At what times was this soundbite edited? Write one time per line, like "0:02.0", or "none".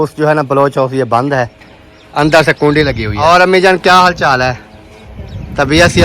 0:03.2